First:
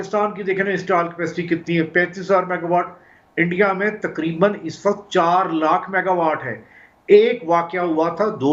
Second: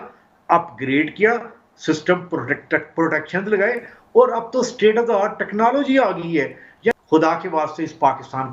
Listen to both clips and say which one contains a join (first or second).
second